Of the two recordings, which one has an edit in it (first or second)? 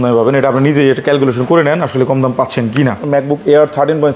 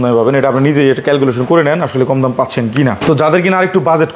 first